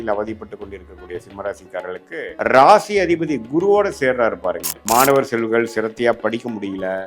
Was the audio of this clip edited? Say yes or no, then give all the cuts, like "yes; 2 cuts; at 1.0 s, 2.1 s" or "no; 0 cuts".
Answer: yes; 2 cuts; at 2.3 s, 4.7 s